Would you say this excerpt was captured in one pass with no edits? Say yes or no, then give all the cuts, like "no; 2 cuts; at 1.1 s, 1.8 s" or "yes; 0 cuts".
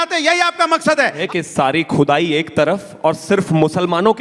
no; 1 cut; at 1.2 s